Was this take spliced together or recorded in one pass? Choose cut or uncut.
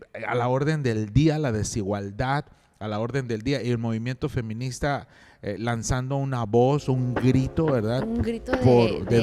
uncut